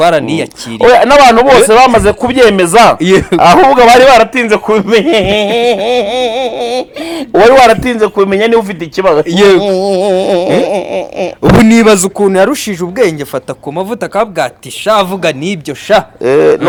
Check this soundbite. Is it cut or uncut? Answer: uncut